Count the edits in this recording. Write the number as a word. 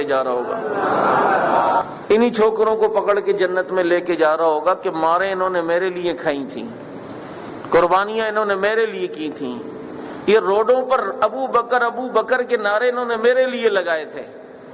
one